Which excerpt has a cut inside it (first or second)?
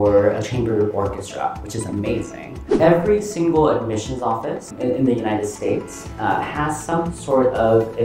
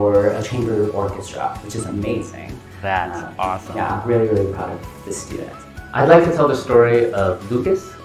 first